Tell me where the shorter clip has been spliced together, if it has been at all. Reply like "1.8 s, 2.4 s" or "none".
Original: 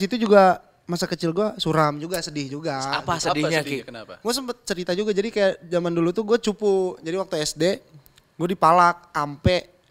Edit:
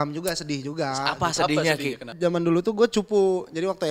2.1 s